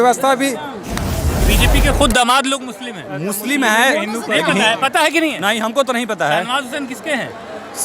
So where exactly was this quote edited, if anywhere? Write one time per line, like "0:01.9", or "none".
0:01.3